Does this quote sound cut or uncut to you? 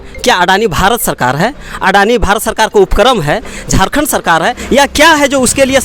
uncut